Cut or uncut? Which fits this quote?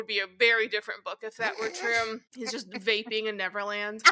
cut